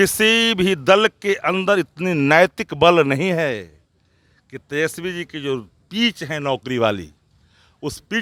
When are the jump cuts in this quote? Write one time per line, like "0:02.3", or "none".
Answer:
none

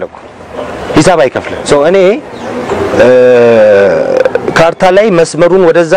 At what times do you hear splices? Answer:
0:01.6

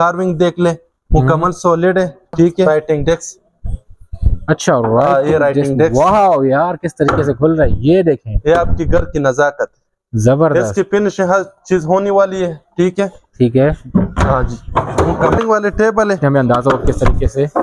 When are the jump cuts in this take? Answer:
0:02.7
0:15.4
0:16.2

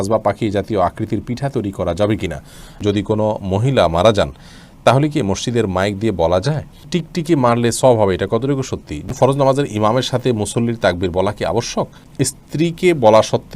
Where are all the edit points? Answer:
0:02.8
0:06.9
0:09.1
0:12.0

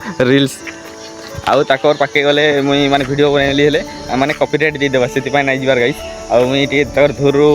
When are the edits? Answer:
none

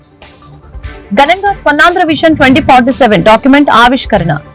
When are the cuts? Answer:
0:01.0

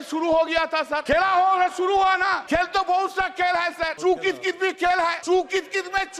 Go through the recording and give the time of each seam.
0:01.0
0:02.4
0:03.9
0:05.2

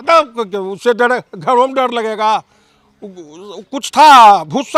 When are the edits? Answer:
none

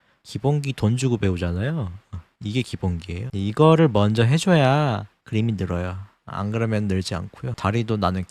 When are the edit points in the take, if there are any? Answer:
none

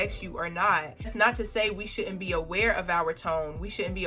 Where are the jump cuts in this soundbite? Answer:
none

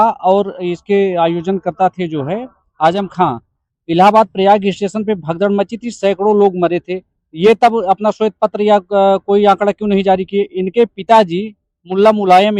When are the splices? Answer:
none

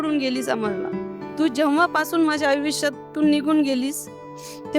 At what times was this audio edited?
0:01.2

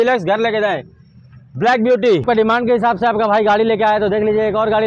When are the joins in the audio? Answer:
0:02.2

